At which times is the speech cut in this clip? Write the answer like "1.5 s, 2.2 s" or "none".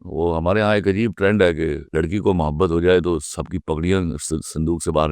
1.8 s